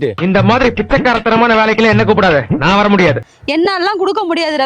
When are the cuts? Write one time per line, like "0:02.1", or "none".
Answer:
0:03.3

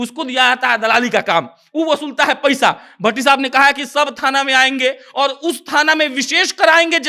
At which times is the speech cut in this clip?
none

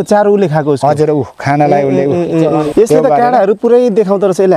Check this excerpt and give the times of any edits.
0:02.7

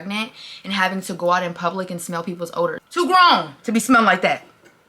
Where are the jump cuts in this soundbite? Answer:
0:02.8

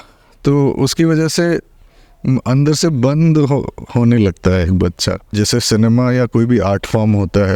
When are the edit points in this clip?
0:05.3

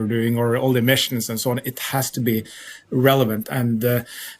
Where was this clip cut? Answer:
0:03.5

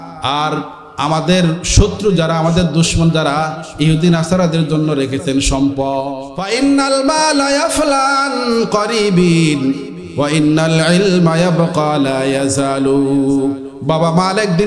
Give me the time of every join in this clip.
0:06.1

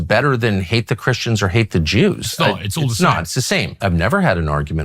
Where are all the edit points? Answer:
0:03.8

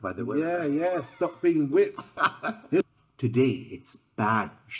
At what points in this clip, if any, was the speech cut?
0:02.8

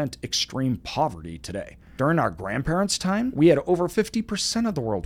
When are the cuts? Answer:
0:01.8
0:03.3

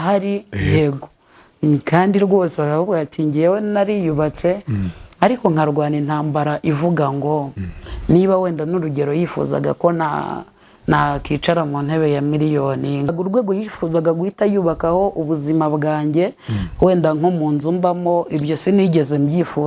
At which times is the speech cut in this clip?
0:13.1

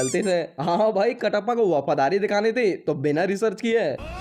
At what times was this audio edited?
none

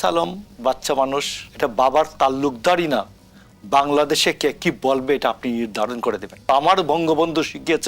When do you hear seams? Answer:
0:01.4
0:06.5

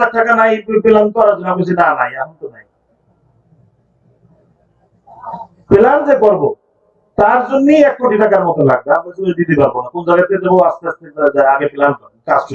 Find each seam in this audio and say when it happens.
none

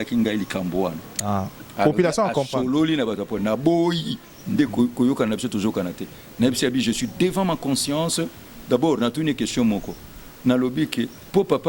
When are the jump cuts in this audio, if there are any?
none

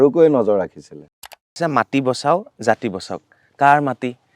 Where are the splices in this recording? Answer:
0:01.6

